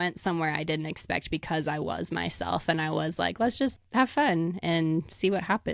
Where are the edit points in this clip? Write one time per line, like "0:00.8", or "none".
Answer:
0:03.7